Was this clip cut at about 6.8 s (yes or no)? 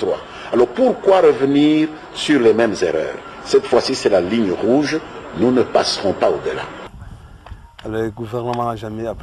yes